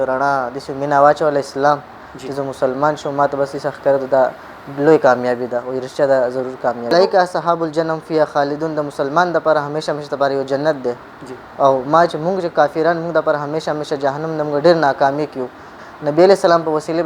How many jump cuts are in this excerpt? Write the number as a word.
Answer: two